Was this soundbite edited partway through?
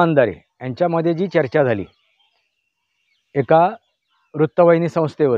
no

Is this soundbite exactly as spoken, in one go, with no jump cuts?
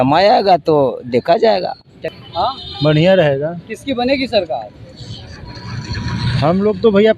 no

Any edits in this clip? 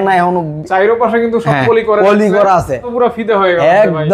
yes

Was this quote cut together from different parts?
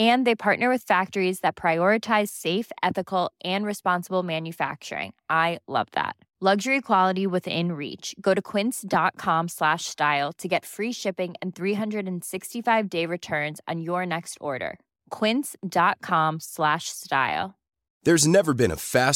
no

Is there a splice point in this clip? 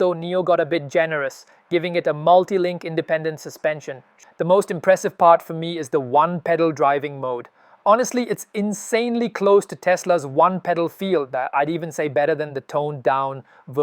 yes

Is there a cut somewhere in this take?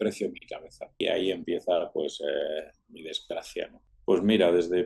yes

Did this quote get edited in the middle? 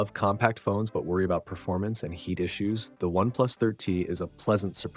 no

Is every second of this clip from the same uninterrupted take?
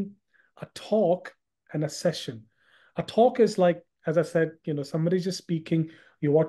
yes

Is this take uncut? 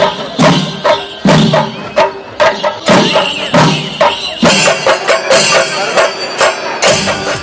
no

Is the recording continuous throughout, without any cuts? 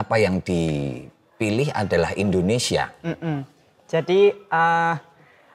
yes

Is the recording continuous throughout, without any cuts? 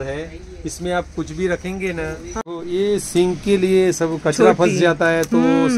no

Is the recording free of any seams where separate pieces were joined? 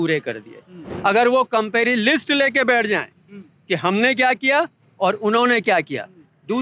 no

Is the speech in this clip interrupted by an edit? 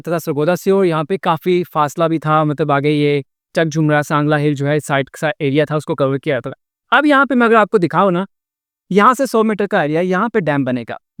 no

